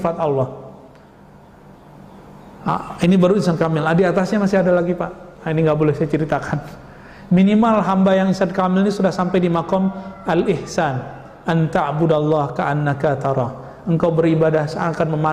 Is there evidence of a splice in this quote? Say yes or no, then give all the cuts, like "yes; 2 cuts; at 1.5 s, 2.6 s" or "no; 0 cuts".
no; 0 cuts